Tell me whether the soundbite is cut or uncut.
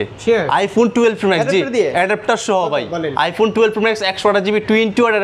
uncut